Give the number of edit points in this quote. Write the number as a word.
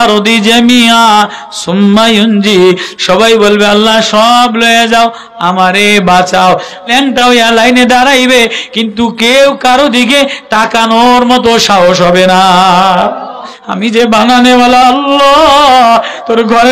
two